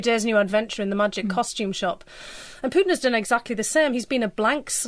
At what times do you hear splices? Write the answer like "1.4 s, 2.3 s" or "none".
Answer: 3.0 s